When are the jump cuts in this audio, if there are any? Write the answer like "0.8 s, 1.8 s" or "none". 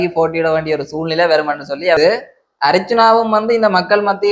2.0 s